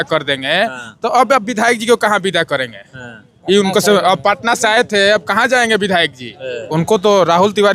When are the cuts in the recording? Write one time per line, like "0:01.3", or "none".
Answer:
0:06.5